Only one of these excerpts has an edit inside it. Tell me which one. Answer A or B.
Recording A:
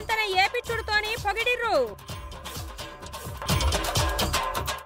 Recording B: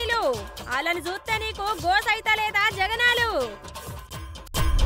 A